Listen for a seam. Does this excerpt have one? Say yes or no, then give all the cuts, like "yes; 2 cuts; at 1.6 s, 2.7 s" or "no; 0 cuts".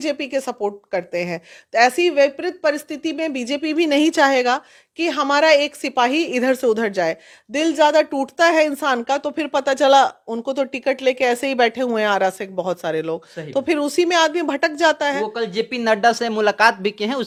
no; 0 cuts